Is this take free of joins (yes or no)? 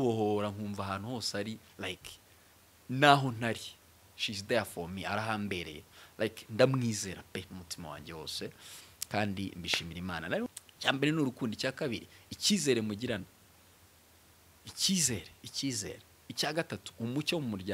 no